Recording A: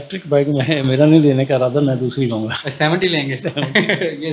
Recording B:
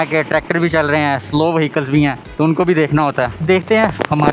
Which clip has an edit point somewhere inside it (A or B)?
B